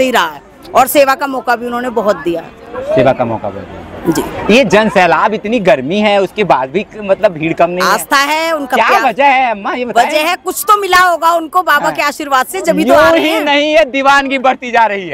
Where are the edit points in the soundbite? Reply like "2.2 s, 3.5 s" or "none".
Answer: none